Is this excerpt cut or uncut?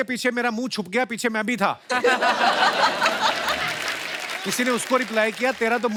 uncut